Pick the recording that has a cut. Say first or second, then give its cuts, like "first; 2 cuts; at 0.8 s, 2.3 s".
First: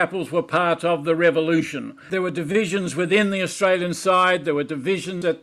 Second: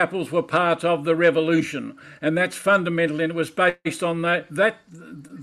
first; 1 cut; at 2.0 s